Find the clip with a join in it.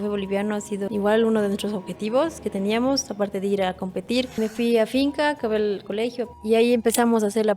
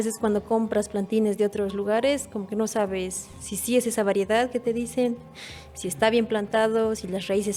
first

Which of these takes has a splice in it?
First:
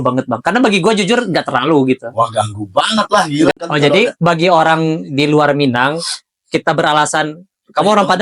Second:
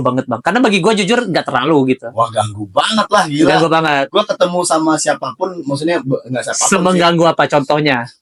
first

